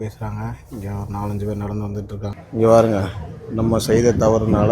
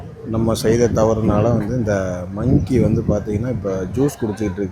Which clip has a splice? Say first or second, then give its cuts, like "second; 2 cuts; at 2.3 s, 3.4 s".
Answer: first; 1 cut; at 2.3 s